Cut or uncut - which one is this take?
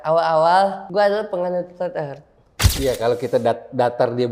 cut